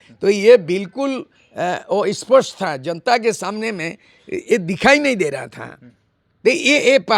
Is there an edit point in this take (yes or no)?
no